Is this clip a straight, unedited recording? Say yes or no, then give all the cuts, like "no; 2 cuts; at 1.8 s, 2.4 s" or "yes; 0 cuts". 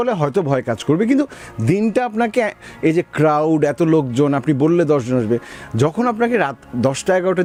yes; 0 cuts